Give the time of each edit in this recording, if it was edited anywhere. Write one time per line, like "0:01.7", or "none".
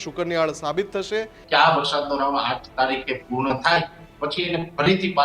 0:01.4